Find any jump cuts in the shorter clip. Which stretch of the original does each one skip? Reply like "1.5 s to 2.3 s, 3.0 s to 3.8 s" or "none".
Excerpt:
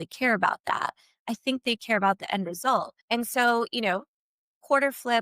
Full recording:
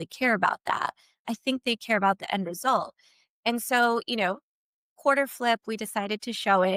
3.0 s to 3.3 s